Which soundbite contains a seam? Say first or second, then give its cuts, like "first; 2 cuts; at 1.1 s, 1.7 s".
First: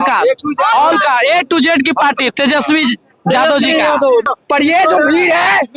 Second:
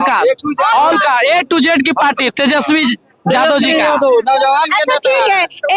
first; 1 cut; at 4.2 s